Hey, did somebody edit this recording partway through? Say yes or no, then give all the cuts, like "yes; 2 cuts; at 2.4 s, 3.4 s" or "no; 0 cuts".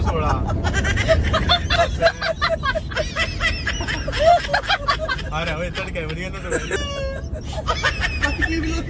no; 0 cuts